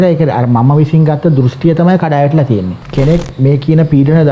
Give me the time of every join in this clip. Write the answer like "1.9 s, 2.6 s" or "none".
2.8 s